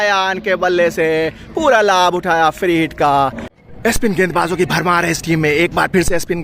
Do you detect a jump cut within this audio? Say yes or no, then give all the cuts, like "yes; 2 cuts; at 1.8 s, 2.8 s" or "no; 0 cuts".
yes; 1 cut; at 3.5 s